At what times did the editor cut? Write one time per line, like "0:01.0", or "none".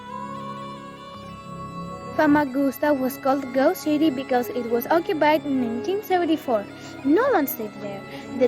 0:01.1